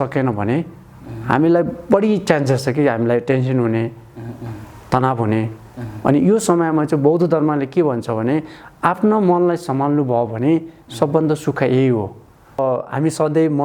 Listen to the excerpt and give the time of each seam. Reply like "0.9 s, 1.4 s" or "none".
12.6 s